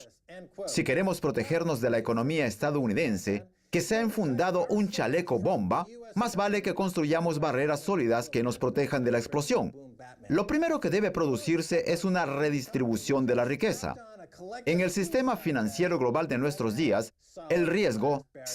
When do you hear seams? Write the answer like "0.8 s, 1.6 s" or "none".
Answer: 10.8 s